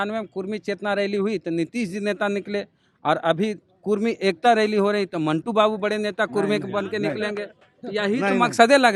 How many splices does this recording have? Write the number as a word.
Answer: zero